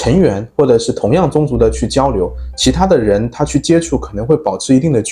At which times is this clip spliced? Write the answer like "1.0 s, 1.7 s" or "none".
none